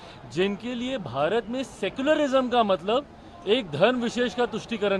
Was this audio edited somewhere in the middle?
no; 0 cuts

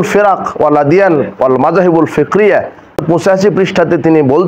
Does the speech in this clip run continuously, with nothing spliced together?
no; 1 cut; at 3.0 s

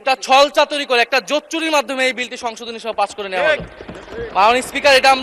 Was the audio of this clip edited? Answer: no; 0 cuts

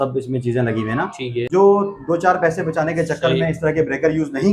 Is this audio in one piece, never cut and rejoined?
no; 1 cut; at 1.4 s

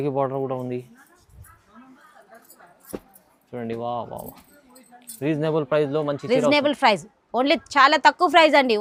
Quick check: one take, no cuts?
yes; 0 cuts

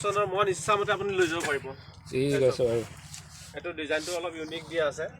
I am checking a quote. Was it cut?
no; 0 cuts

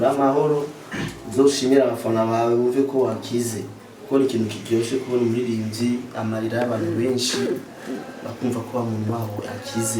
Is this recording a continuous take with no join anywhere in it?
yes; 0 cuts

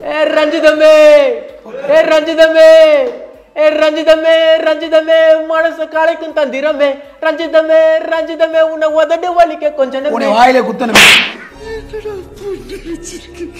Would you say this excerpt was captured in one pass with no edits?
yes; 0 cuts

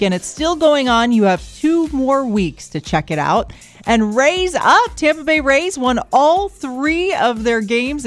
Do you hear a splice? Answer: no; 0 cuts

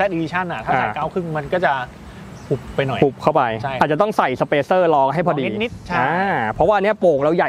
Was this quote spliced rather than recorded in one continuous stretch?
no; 0 cuts

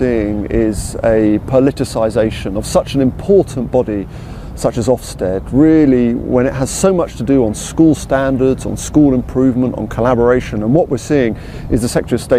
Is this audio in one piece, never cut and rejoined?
no; 1 cut; at 11.2 s

